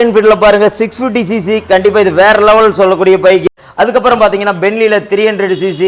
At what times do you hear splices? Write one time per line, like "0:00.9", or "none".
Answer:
0:03.4